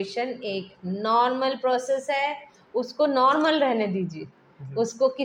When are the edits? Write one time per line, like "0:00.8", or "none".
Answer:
none